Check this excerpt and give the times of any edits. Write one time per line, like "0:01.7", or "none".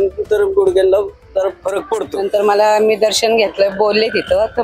0:02.1